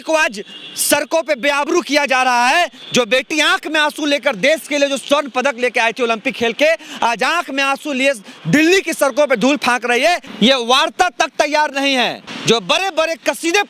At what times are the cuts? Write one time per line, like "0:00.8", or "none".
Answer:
0:10.3
0:12.3